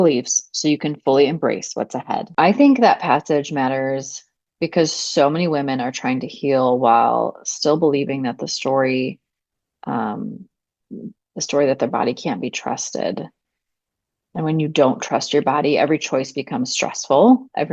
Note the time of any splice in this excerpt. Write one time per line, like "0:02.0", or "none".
0:02.3